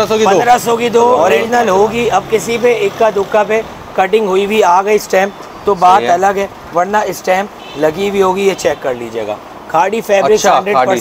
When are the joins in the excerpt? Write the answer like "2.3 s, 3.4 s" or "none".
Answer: 1.2 s